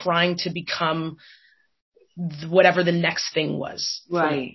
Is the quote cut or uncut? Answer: uncut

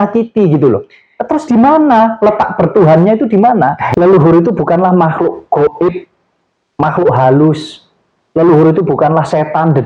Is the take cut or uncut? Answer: cut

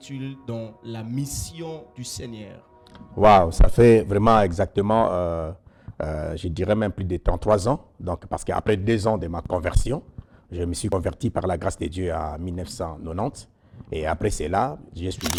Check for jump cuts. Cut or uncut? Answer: uncut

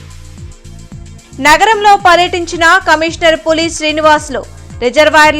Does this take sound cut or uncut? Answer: cut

